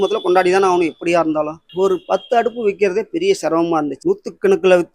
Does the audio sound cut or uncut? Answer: cut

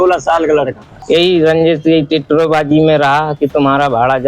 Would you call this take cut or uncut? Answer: cut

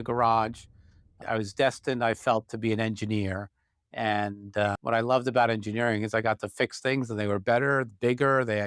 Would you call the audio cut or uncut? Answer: cut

